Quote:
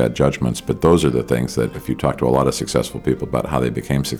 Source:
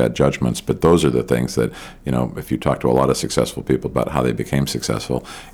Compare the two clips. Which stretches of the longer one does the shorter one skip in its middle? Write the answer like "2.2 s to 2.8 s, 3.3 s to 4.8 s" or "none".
1.8 s to 2.4 s